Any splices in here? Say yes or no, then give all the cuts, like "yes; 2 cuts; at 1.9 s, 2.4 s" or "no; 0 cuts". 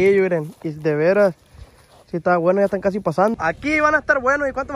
yes; 1 cut; at 3.3 s